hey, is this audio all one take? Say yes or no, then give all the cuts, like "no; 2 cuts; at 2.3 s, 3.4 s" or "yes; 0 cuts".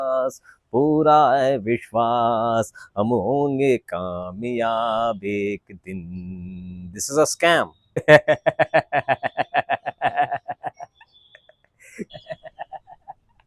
no; 2 cuts; at 8.0 s, 12.0 s